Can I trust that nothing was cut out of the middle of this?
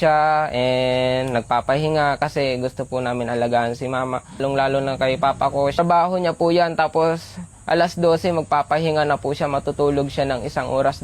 no; 2 cuts; at 4.4 s, 5.8 s

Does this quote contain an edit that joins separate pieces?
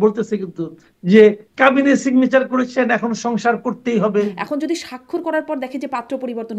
yes; 1 cut; at 4.4 s

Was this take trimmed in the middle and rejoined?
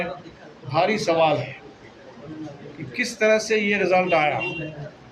no; 0 cuts

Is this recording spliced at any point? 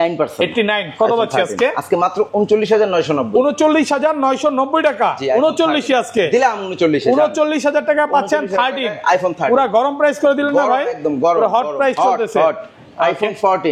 no; 0 cuts

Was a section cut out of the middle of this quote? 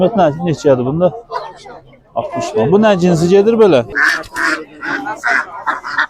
yes; 1 cut; at 3.9 s

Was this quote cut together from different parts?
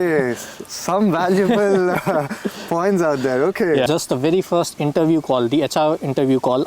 yes; 1 cut; at 3.9 s

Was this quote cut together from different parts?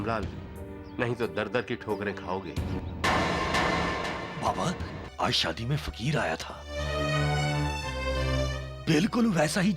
yes; 1 cut; at 5.0 s

